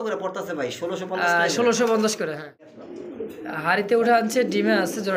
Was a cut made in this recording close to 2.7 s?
yes; 1 cut; at 2.7 s

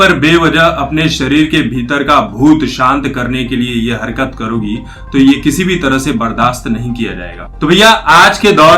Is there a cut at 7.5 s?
yes; 1 cut; at 7.5 s

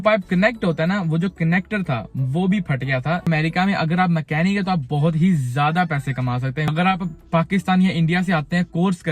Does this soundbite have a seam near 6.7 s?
yes; 2 cuts; at 3.2 s, 6.7 s

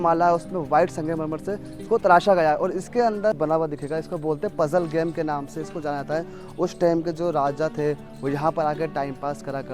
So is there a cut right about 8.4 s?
no; 1 cut; at 3.4 s

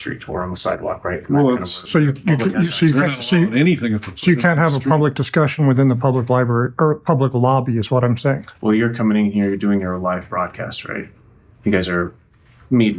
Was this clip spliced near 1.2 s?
no; 0 cuts

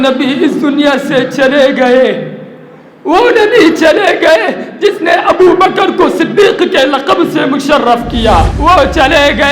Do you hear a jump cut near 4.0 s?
no; 1 cut; at 8.5 s

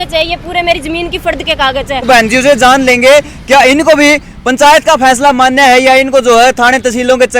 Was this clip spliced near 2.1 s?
yes; 1 cut; at 2.1 s

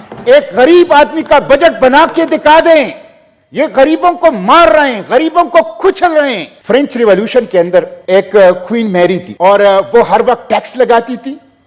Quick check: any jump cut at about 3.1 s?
no; 3 cuts; at 6.5 s, 8.0 s, 9.3 s

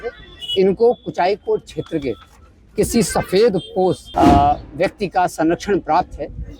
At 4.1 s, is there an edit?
yes; 1 cut; at 4.1 s

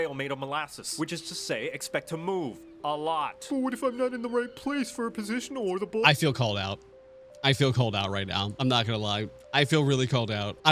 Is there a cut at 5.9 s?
no; 0 cuts

